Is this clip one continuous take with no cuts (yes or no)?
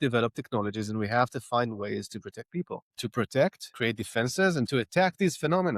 no